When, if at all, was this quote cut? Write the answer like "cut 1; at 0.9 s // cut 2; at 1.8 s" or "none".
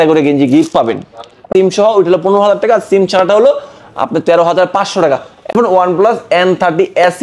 cut 1; at 1.5 s // cut 2; at 5.5 s